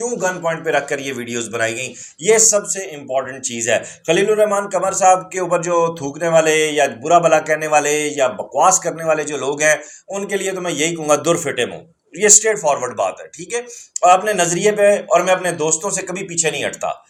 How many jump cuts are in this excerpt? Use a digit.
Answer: 0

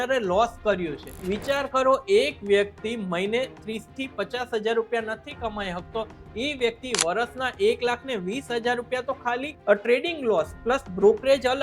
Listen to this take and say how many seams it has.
2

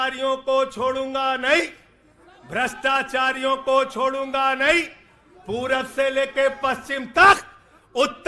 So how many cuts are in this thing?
0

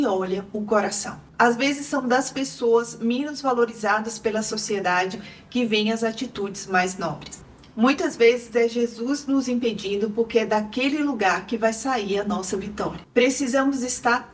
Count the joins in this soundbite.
3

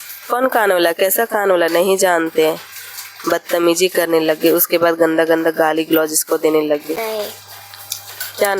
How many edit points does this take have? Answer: 1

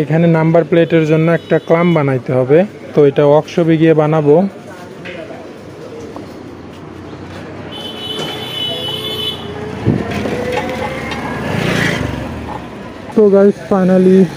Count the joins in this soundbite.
0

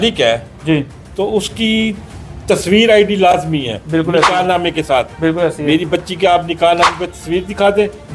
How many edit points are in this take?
0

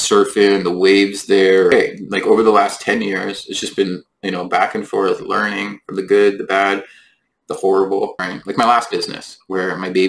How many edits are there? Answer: 2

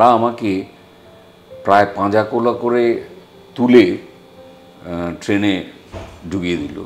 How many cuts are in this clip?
0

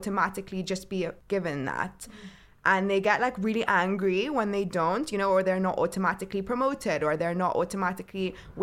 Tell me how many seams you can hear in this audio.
1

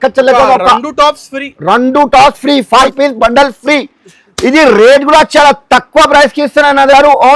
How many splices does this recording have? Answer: 1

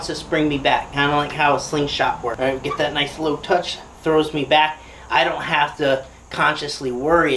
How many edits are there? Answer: 1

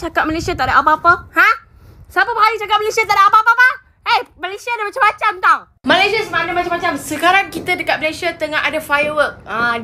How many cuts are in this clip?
0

